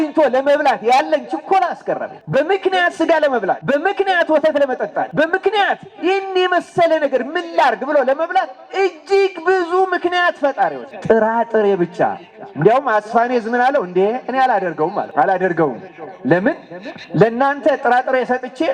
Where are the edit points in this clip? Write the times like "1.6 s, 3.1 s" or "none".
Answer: 2.1 s, 3.6 s, 5.1 s, 10.9 s, 15.1 s